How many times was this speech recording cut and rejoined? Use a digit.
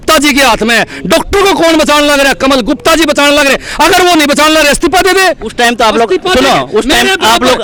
0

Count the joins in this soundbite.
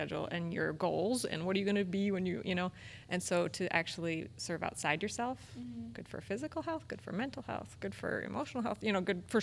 0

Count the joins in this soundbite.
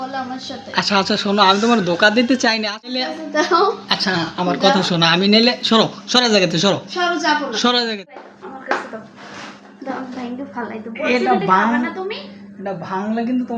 2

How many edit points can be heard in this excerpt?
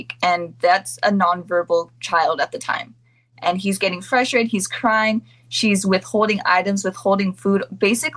0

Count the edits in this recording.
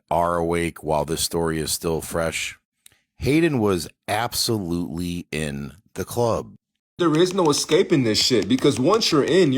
1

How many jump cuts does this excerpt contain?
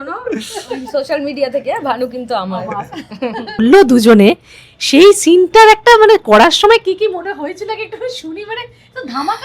1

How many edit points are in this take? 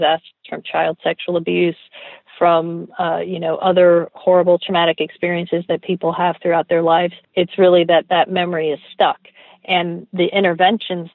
1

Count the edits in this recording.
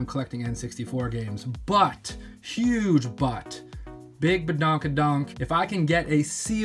1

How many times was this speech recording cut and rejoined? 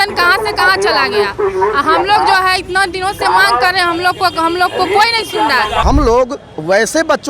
1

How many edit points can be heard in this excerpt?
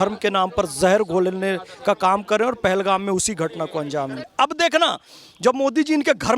1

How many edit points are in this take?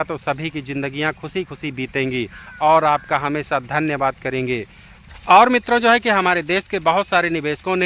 1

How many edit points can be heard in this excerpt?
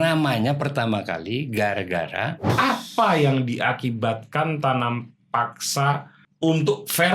2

